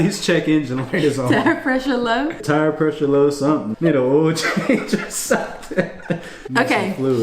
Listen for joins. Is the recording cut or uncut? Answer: cut